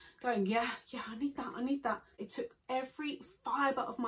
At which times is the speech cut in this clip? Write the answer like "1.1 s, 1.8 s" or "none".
2.2 s